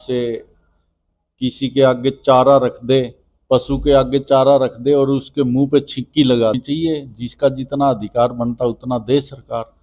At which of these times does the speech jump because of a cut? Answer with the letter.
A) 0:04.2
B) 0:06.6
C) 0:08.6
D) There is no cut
B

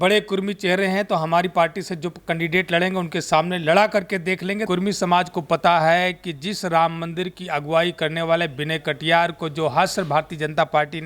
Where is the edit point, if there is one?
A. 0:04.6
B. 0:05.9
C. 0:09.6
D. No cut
A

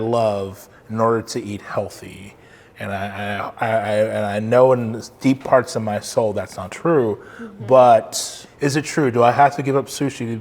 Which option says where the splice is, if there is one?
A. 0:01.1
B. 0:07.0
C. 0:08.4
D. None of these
C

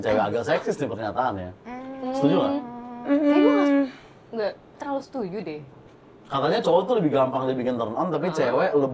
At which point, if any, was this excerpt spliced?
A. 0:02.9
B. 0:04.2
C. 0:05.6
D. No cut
D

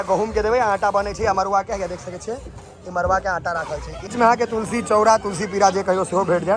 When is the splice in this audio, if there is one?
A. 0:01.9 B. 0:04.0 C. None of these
B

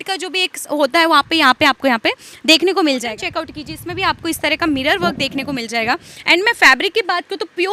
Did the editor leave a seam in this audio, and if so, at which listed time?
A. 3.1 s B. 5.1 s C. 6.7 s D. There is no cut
A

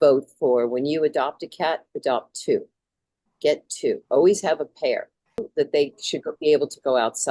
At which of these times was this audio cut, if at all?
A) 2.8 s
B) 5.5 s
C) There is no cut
B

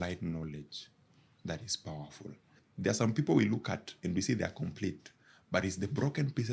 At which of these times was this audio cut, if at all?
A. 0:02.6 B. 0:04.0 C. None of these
A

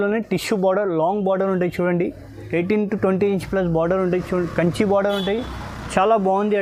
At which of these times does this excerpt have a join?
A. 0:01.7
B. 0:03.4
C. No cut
C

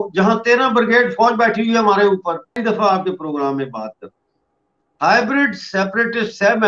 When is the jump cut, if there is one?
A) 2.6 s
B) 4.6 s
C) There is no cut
A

